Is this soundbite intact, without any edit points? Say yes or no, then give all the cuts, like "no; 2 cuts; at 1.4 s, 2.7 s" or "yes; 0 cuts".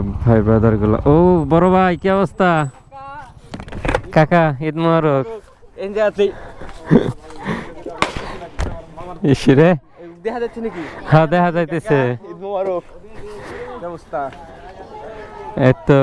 yes; 0 cuts